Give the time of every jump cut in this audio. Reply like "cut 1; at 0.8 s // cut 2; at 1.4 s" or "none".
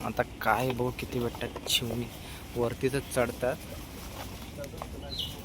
none